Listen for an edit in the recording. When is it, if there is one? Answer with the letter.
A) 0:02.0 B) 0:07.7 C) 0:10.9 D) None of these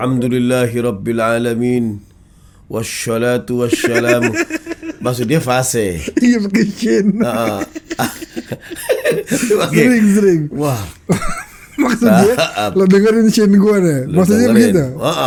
D